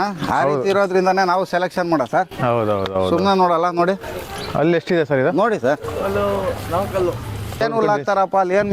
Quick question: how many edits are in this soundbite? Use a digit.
1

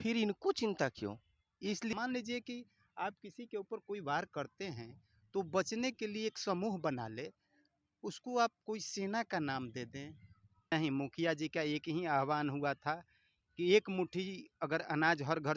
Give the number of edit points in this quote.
2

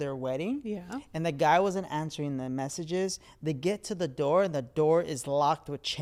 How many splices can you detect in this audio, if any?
0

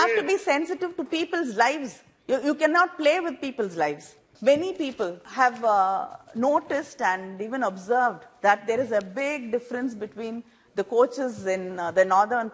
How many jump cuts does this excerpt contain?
2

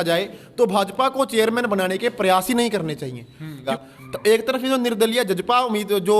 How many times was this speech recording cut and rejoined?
1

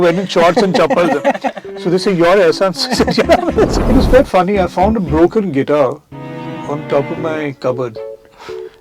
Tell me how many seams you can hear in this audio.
1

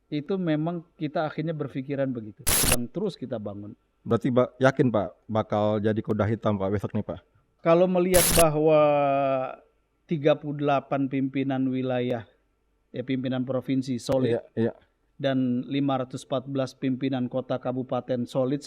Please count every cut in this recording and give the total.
1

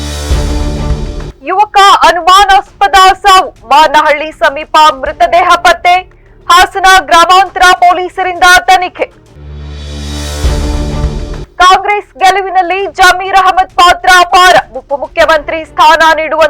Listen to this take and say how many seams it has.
1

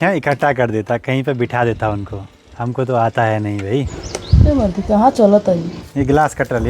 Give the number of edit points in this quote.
0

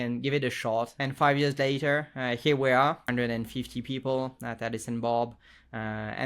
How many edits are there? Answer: 2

